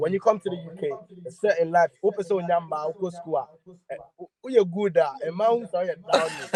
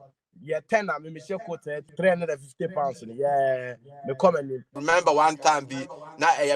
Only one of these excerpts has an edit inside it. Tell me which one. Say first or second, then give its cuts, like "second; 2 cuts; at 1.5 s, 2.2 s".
second; 2 cuts; at 1.8 s, 4.8 s